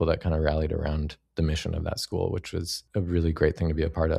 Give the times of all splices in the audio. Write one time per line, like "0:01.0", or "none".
none